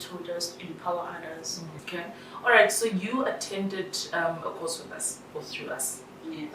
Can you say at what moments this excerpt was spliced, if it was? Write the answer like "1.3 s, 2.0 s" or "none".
1.8 s